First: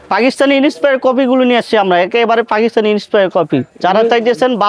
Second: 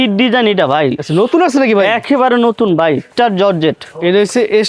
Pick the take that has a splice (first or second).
second